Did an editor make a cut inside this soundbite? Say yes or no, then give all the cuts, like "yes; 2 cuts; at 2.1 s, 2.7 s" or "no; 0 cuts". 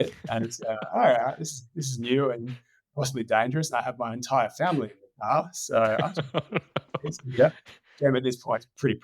no; 0 cuts